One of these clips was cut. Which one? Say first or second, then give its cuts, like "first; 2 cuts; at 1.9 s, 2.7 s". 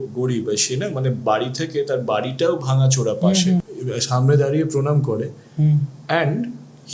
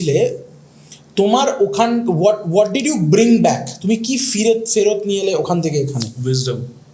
first; 1 cut; at 3.6 s